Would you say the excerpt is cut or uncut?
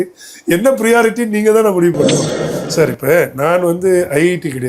cut